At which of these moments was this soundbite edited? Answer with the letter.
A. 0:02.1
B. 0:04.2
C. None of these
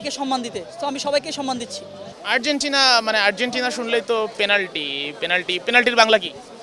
A